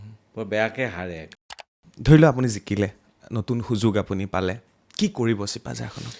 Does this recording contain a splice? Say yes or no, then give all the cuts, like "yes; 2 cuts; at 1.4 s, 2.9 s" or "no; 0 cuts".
yes; 1 cut; at 1.8 s